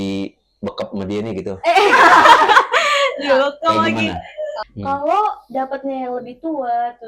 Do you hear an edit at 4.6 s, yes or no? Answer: yes